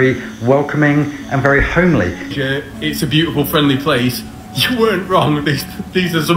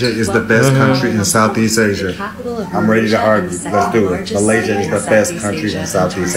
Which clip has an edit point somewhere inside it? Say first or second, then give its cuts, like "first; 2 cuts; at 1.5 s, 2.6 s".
first; 1 cut; at 2.3 s